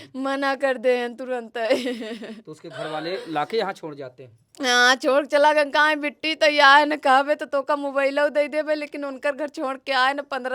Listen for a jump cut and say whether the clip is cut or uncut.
uncut